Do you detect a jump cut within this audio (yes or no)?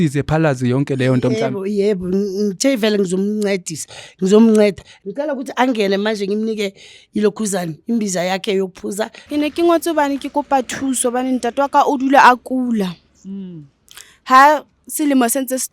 yes